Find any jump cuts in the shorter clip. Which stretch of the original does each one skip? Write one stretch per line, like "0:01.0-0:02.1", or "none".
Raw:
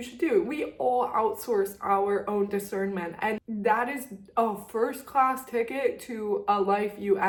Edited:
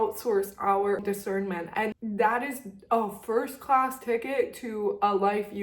0:02.2-0:02.5